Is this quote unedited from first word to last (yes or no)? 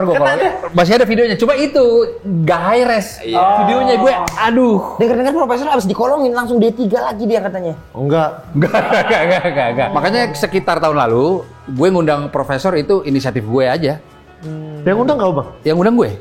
no